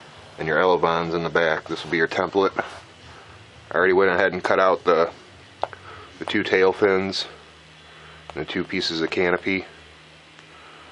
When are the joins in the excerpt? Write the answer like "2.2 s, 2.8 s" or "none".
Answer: none

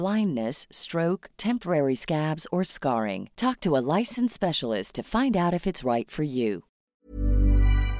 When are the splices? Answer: 7.0 s

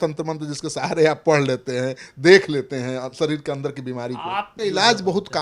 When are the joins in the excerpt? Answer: 4.5 s

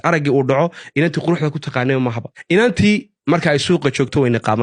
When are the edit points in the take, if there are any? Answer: 2.3 s

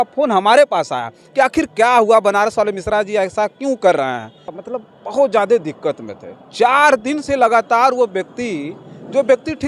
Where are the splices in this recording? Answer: 4.6 s

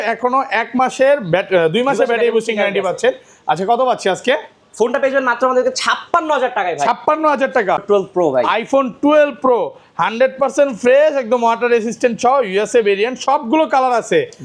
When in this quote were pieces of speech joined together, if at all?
7.8 s

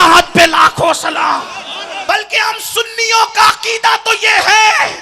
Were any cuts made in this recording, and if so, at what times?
1.9 s

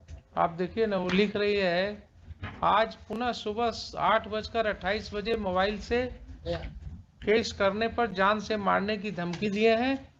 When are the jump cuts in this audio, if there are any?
none

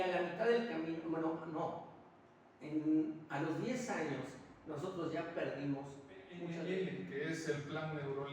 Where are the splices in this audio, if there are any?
6.5 s

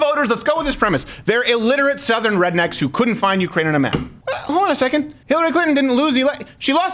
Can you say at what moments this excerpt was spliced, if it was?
4.4 s, 5.2 s

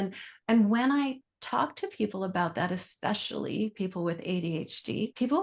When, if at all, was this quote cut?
none

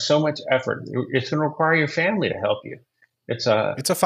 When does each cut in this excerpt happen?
none

